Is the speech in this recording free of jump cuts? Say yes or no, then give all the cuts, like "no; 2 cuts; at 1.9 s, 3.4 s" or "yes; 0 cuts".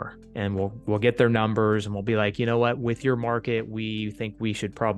yes; 0 cuts